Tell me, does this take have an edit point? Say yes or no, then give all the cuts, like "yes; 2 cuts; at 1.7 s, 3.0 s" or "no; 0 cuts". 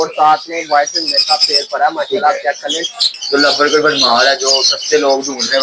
yes; 1 cut; at 3.0 s